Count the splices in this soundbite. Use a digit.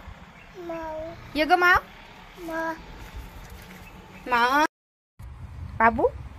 1